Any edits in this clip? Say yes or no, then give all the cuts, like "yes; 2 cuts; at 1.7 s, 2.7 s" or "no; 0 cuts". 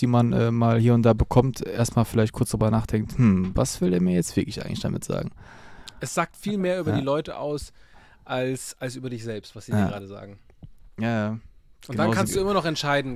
no; 0 cuts